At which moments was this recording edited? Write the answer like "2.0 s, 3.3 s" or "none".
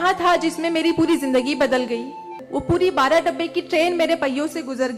2.4 s